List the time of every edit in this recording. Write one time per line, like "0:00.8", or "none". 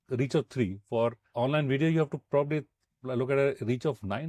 0:01.3